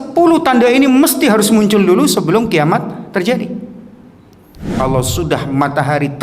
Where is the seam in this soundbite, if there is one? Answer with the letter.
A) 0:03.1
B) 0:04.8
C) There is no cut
B